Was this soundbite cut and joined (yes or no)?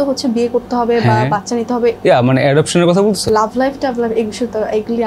yes